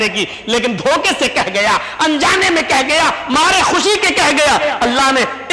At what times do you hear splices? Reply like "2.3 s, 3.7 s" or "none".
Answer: none